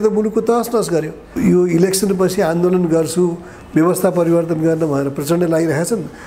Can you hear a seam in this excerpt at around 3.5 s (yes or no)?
no